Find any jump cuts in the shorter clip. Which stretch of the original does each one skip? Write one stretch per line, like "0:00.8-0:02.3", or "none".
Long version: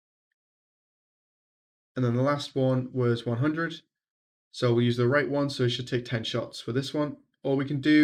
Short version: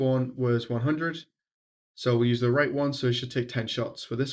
none